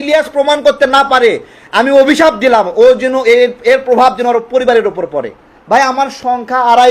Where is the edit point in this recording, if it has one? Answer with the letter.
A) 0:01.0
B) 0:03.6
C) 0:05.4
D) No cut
C